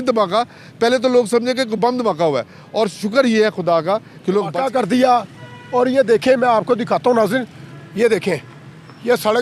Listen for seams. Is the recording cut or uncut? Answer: cut